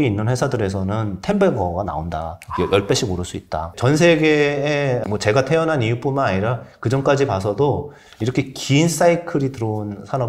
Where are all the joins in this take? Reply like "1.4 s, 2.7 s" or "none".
3.7 s, 5.0 s

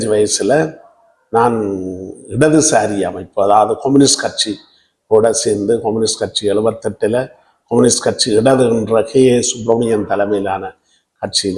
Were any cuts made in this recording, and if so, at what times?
none

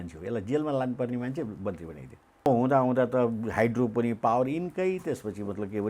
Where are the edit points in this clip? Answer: 2.5 s

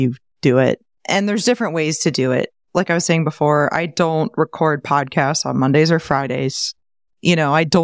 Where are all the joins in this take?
0.9 s, 2.6 s

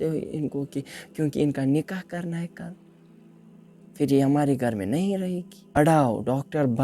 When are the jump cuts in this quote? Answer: 5.7 s

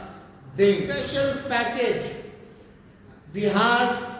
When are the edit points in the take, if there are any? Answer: 1.1 s

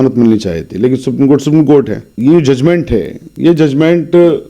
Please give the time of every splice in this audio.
2.0 s

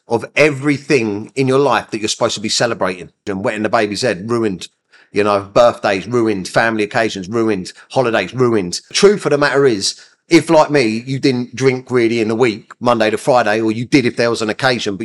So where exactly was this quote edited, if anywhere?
3.3 s, 8.9 s

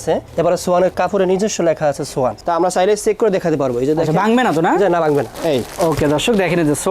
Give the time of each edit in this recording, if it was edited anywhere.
2.4 s, 5.3 s

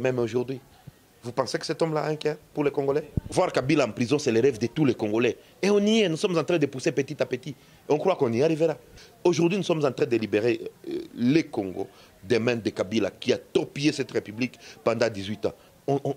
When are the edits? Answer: 3.3 s, 9.0 s

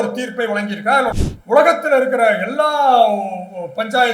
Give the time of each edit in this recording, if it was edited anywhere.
1.2 s

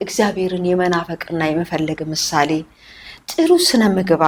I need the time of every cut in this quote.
none

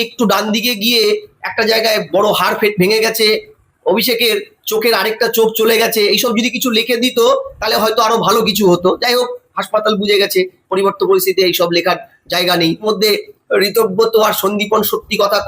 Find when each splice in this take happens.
12.8 s

